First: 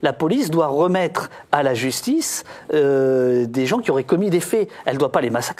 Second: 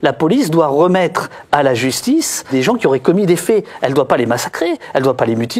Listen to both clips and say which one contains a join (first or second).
second